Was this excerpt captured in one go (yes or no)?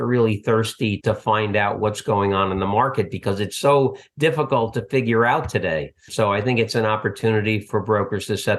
no